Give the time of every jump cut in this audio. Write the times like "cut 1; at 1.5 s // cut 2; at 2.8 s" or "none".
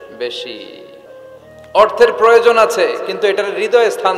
cut 1; at 1.1 s